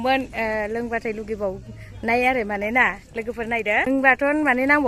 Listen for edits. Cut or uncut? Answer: cut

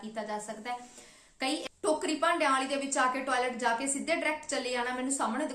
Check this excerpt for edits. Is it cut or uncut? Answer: cut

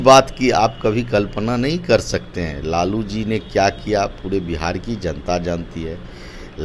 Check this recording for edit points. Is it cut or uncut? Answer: uncut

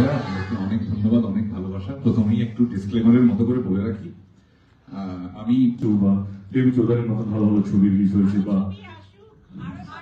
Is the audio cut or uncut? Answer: cut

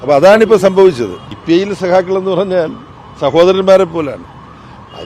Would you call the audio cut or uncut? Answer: cut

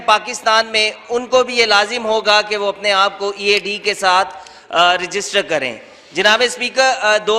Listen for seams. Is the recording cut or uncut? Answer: uncut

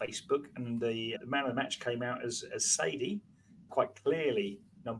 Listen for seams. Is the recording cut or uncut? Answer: uncut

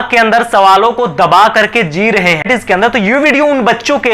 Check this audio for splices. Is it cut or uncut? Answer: cut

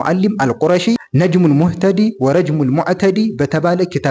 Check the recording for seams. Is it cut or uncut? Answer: uncut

